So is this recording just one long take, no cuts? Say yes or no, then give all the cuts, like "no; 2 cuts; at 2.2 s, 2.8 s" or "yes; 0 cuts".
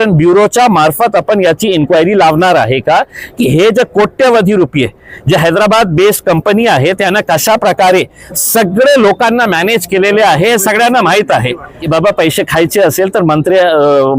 no; 1 cut; at 11.7 s